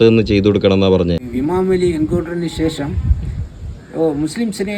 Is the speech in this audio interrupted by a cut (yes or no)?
yes